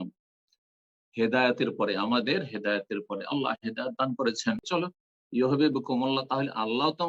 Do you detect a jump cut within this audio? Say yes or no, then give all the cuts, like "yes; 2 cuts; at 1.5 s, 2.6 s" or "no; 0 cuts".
yes; 1 cut; at 4.6 s